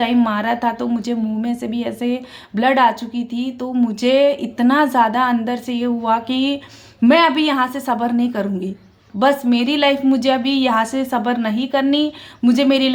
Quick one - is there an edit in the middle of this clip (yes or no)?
no